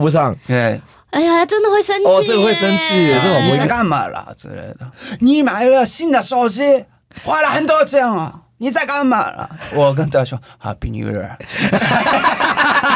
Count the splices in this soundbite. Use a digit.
1